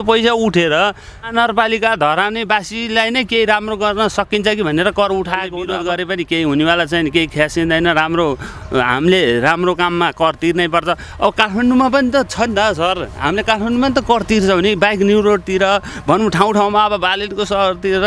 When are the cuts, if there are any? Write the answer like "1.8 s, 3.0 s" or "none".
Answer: 1.3 s, 5.6 s